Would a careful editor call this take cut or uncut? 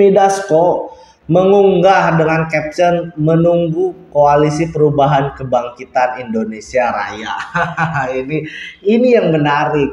uncut